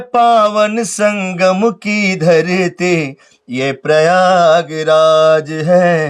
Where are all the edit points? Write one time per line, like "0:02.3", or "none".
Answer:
none